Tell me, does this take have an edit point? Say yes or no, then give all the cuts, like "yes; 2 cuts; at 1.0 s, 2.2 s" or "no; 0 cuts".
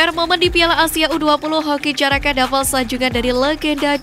no; 0 cuts